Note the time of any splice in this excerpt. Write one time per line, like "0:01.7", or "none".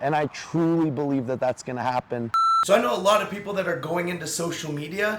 0:02.3